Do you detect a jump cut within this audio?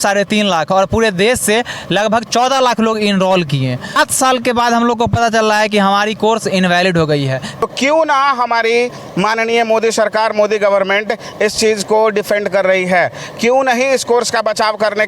yes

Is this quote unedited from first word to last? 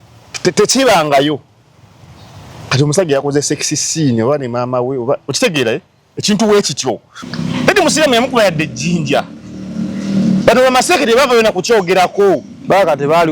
no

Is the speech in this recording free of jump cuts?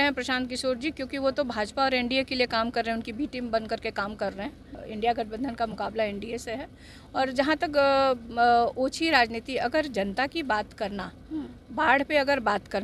no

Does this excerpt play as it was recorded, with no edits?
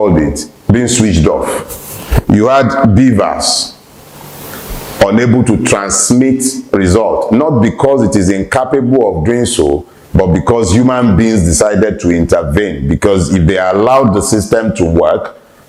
yes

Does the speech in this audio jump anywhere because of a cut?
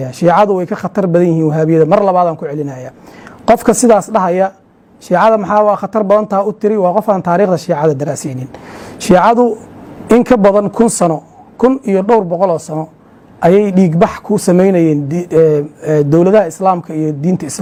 no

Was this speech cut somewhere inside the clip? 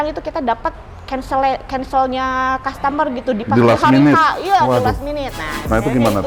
no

